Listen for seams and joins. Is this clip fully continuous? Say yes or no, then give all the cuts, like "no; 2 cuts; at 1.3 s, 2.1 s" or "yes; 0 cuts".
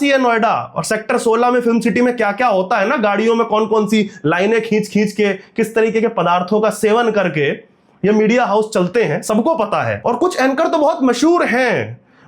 yes; 0 cuts